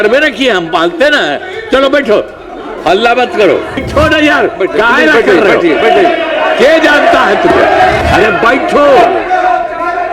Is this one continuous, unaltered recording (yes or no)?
no